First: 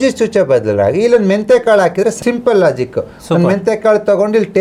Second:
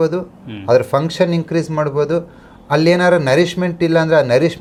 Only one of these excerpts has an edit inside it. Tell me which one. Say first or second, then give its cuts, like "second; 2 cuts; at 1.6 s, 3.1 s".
first; 1 cut; at 2.2 s